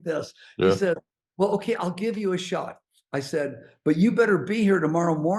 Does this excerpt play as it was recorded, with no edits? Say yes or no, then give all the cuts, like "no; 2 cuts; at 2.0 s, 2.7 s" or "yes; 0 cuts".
yes; 0 cuts